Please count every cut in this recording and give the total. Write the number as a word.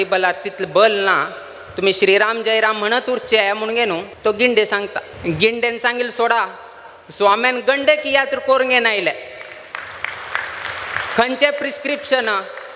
two